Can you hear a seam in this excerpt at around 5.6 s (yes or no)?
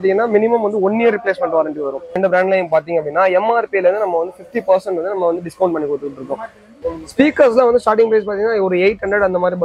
no